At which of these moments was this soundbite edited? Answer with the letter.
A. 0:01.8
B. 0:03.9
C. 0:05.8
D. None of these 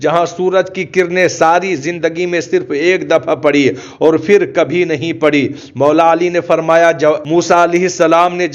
D